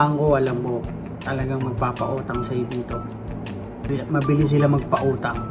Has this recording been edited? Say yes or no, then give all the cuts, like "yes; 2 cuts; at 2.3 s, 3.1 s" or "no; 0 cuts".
yes; 1 cut; at 3.9 s